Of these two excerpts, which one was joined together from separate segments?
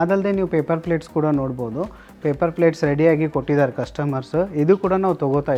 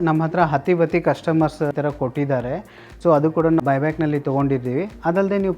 second; 2 cuts; at 1.7 s, 3.6 s

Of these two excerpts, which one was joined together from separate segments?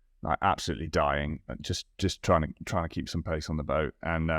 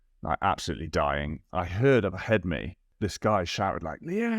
second; 2 cuts; at 1.4 s, 2.9 s

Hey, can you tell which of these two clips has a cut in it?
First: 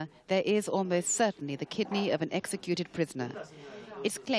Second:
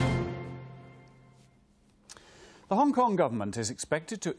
first; 1 cut; at 2.3 s

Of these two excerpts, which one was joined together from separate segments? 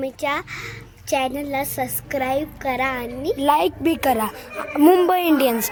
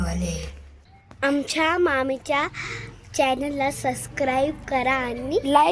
second; 1 cut; at 1.2 s

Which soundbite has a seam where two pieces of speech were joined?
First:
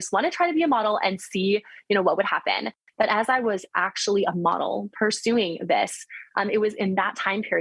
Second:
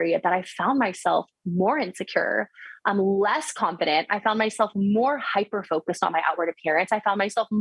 first; 1 cut; at 2.8 s

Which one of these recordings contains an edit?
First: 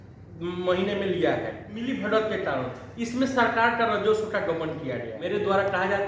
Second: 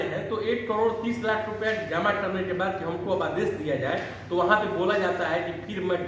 first; 2 cuts; at 1.7 s, 5.1 s

